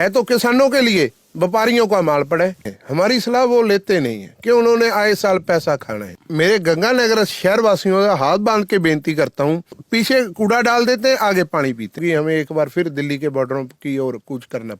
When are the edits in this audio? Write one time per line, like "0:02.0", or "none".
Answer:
0:02.8
0:06.2
0:09.8
0:12.0